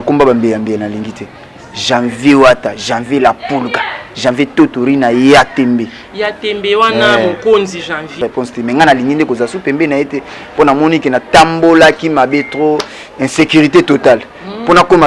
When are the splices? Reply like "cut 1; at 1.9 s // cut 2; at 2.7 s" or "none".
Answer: cut 1; at 8.2 s